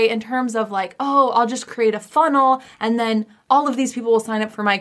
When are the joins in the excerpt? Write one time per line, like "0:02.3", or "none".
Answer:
0:03.3